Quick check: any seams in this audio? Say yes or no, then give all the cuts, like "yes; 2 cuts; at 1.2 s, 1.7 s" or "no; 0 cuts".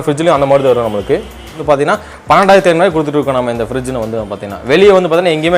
yes; 1 cut; at 1.5 s